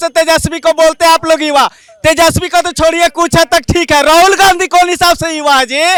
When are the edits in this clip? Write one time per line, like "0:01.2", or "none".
none